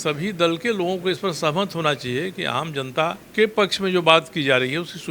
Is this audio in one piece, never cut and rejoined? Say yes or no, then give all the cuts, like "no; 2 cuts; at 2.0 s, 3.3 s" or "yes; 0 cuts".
no; 1 cut; at 3.2 s